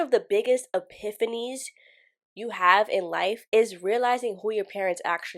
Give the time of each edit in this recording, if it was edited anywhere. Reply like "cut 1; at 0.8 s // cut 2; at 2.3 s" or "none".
none